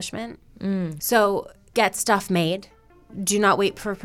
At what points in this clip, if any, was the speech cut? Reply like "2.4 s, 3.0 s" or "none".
0.9 s, 1.6 s